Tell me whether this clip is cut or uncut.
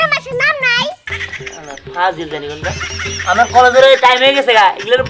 cut